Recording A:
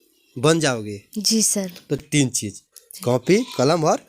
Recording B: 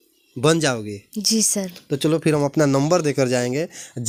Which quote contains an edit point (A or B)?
A